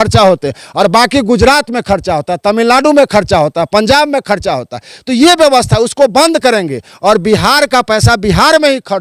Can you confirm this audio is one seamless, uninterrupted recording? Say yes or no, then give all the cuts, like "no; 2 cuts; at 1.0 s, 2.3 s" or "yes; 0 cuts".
yes; 0 cuts